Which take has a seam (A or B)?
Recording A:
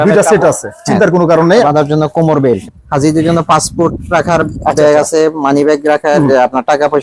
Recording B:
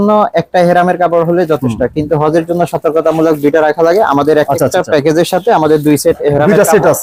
A